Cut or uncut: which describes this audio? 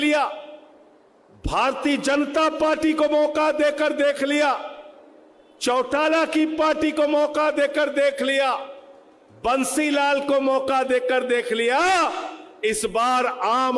uncut